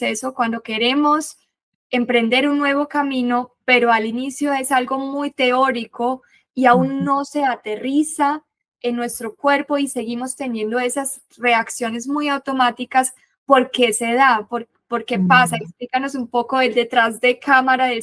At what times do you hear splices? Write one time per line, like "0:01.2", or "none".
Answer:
none